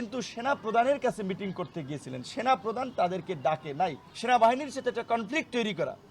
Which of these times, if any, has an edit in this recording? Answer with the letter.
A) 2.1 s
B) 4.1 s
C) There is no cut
B